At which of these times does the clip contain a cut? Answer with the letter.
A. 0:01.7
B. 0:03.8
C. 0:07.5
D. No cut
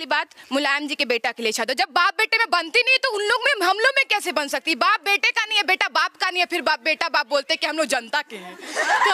D